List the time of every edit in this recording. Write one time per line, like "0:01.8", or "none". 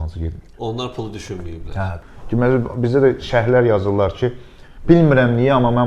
0:02.1